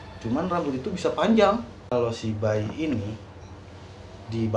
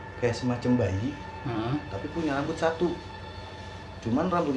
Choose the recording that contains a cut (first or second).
first